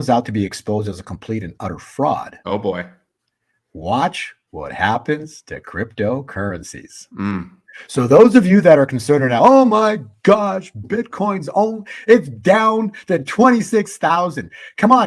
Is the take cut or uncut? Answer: uncut